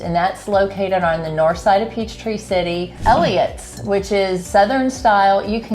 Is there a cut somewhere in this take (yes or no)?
yes